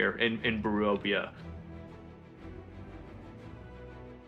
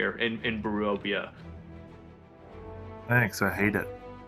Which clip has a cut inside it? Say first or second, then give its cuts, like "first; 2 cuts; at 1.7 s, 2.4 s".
second; 1 cut; at 2.4 s